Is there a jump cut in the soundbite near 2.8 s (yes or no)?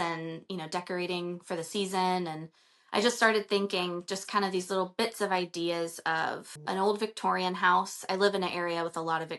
no